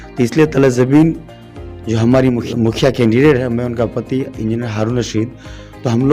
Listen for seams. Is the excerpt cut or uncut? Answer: cut